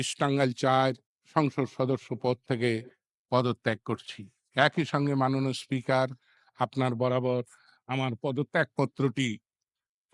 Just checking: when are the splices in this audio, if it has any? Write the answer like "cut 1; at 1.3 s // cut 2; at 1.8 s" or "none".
cut 1; at 1.1 s